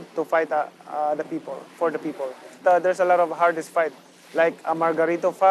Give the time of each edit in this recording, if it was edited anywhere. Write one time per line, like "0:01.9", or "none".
0:02.6